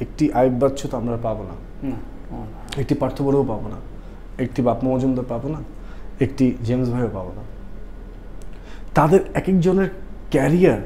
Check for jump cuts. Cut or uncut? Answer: uncut